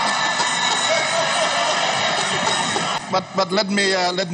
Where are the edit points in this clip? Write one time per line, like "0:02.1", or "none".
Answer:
0:03.0